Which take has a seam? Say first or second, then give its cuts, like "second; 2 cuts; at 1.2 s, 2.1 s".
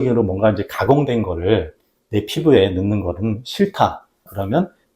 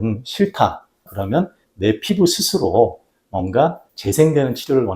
second; 1 cut; at 3.9 s